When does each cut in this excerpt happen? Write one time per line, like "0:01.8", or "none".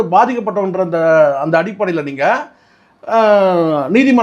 none